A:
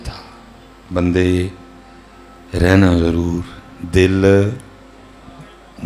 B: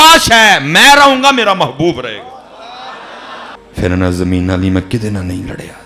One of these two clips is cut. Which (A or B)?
B